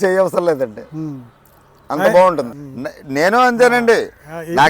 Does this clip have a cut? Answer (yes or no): yes